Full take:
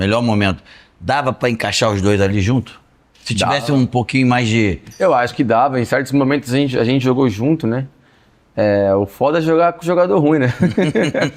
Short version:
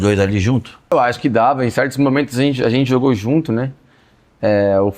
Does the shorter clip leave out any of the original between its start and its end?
yes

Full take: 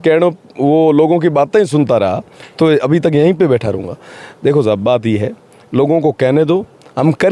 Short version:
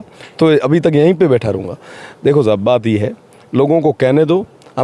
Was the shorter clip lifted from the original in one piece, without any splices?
yes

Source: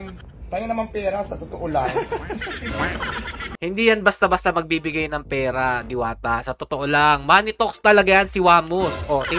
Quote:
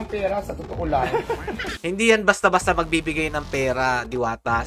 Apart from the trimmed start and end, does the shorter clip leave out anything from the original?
yes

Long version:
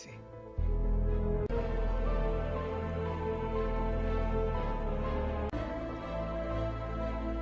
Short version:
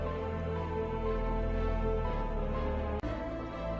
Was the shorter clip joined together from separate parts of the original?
no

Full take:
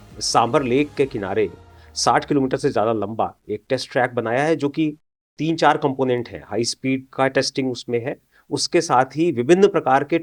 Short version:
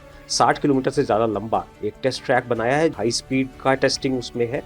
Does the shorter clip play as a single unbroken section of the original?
no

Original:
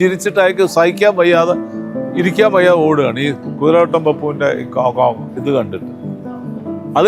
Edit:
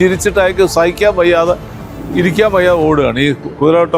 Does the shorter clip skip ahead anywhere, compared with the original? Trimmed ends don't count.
no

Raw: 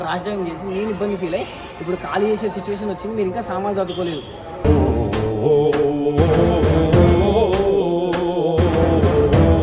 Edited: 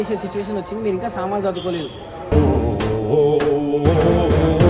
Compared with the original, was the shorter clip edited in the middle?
no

